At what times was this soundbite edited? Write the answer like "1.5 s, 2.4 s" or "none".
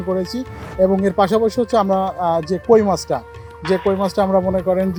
none